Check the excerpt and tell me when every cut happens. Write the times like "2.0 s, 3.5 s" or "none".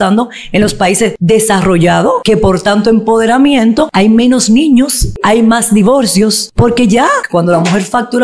1.2 s, 2.2 s, 3.9 s, 5.2 s, 6.4 s, 7.2 s